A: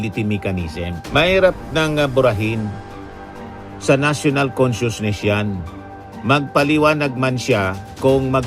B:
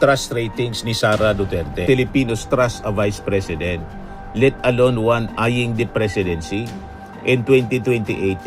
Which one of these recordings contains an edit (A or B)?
B